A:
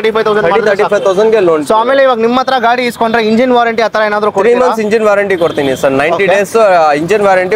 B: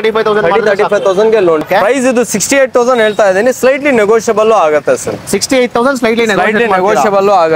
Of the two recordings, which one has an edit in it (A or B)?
B